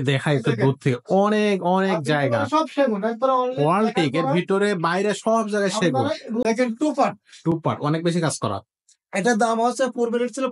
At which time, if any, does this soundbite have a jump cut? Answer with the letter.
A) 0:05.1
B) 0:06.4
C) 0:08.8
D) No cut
B